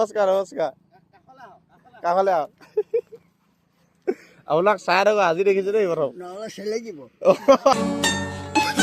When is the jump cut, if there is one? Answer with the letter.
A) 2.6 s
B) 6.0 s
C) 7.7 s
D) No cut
C